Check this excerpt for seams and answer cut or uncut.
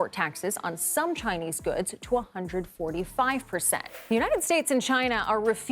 cut